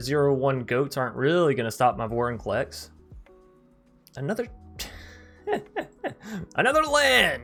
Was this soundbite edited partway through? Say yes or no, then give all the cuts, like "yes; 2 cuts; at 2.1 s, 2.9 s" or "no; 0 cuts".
no; 0 cuts